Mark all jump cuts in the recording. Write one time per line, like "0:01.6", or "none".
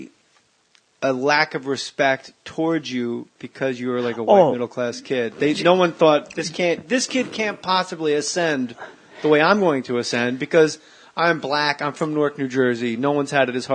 0:05.0

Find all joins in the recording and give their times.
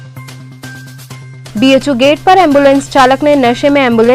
none

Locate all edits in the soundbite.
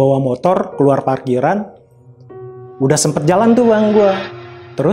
none

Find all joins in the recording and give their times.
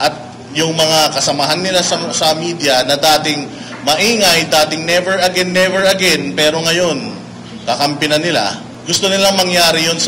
0:08.7

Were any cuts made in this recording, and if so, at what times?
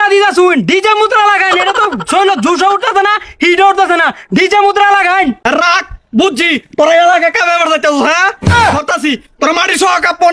none

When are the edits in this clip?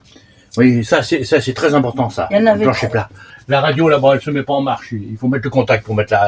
0:03.2

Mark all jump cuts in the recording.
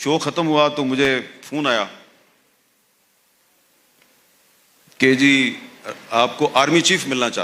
none

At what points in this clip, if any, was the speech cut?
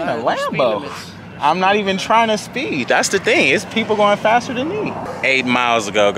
0:05.1

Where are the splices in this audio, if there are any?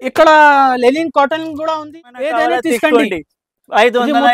0:01.8

